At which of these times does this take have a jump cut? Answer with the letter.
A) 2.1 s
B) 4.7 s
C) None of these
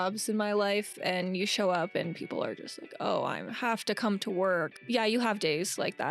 B